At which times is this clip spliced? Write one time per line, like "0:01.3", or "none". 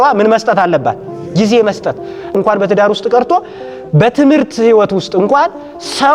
0:02.4